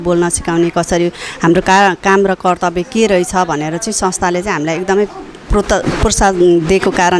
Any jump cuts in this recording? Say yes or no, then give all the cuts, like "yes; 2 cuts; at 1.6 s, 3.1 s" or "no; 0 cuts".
no; 0 cuts